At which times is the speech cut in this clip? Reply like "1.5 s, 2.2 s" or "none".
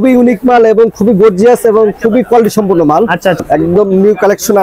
3.4 s